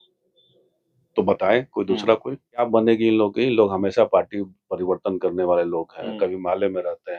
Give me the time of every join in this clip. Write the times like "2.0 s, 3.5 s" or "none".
2.7 s